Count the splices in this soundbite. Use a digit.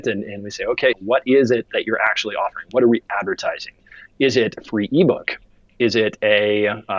2